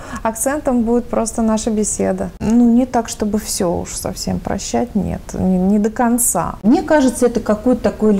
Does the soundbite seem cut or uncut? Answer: cut